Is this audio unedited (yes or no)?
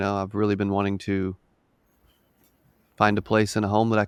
yes